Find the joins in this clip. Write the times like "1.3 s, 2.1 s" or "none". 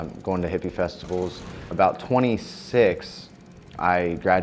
1.7 s